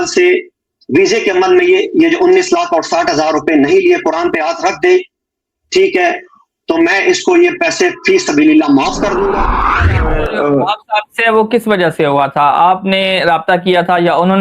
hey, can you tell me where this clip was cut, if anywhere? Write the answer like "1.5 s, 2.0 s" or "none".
9.7 s